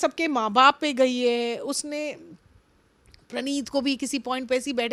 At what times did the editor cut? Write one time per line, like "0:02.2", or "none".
none